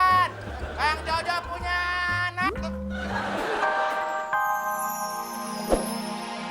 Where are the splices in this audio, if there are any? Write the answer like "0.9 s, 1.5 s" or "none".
3.7 s